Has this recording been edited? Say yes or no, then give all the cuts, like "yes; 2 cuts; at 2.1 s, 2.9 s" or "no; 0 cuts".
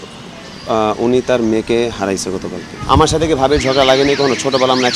yes; 1 cut; at 3.0 s